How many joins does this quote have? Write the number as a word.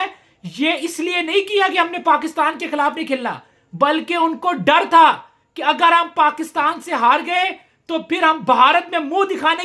zero